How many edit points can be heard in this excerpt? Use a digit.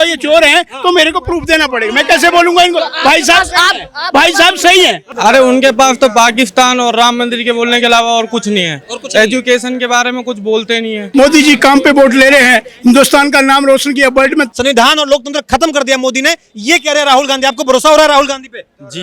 3